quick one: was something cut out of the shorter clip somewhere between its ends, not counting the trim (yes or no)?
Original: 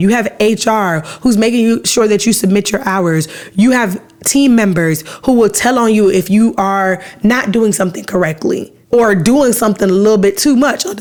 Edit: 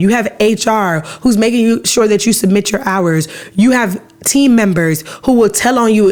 no